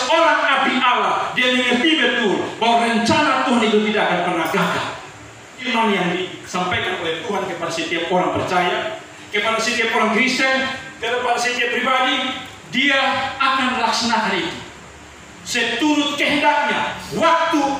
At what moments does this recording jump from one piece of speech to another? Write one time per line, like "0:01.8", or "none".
0:05.6